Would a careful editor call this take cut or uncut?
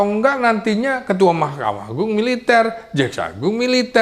uncut